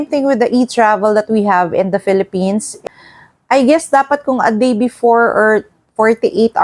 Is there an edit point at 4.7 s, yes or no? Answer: no